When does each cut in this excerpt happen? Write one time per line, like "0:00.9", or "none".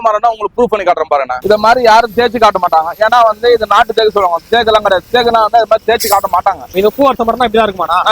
0:01.3
0:06.7